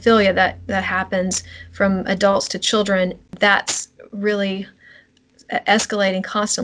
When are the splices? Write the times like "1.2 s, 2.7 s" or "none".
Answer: 3.3 s, 5.1 s